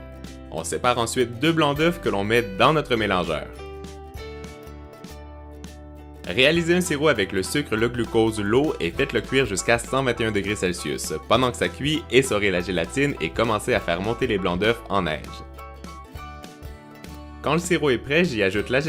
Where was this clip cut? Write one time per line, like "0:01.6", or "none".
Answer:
0:16.9